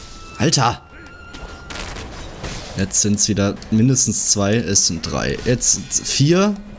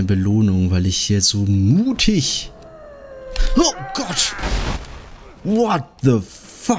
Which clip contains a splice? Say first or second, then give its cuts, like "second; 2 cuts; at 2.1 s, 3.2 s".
first; 1 cut; at 1.9 s